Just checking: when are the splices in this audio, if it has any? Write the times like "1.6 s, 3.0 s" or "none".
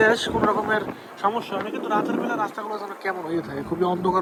none